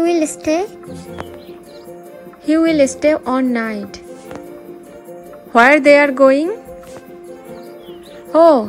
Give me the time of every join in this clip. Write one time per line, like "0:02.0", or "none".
0:02.1
0:04.9
0:07.6